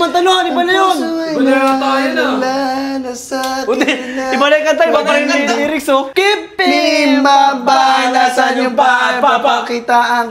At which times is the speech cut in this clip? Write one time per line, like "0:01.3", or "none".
0:06.1